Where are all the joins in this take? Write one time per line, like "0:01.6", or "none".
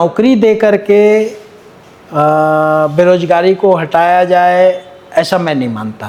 none